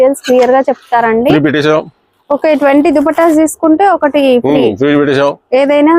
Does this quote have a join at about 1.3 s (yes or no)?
yes